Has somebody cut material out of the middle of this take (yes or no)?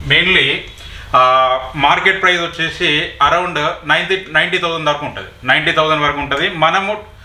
no